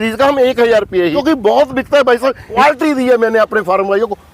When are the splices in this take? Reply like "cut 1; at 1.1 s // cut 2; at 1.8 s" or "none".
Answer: cut 1; at 1.2 s // cut 2; at 2.6 s